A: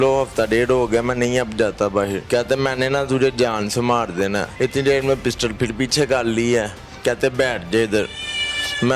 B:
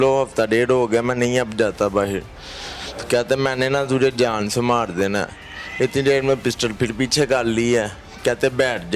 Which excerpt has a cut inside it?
A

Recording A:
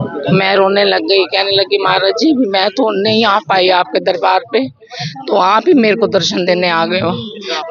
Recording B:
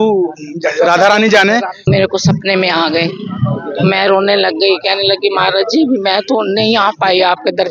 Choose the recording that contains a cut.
B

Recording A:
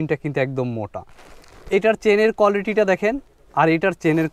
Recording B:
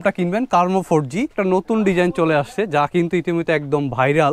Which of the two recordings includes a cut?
B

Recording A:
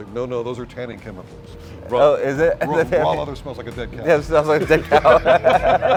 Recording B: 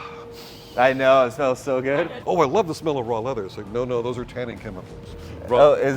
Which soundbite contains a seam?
B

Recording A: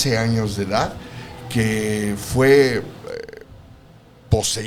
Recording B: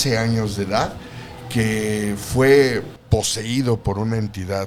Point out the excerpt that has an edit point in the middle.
B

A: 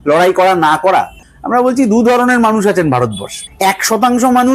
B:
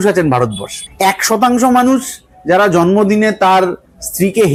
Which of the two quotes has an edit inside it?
A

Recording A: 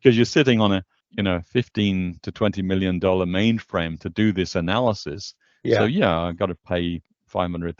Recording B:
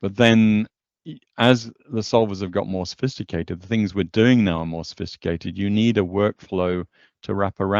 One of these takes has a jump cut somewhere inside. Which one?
A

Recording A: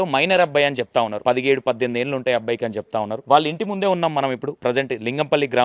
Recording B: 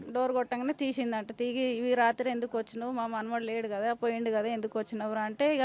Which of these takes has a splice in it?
A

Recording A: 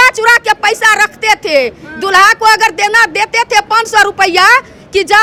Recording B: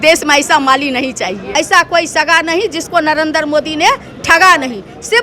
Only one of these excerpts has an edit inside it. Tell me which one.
B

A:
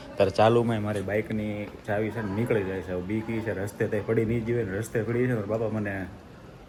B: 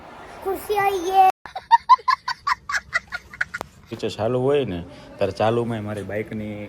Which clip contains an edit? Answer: B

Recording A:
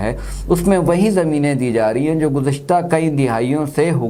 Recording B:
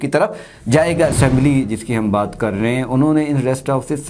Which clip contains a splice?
B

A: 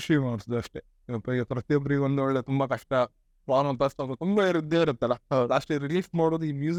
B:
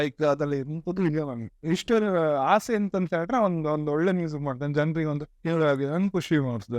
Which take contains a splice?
B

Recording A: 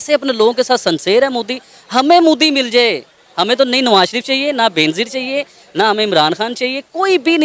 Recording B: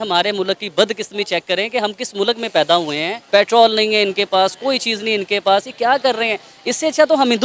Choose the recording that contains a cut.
B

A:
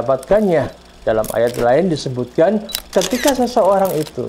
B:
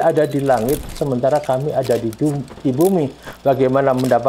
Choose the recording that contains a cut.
A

